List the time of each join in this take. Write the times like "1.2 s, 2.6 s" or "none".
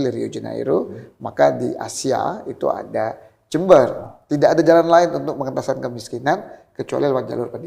4.0 s